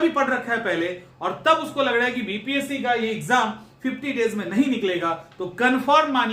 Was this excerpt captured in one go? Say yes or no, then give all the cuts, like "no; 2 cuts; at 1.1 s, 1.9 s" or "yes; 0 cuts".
yes; 0 cuts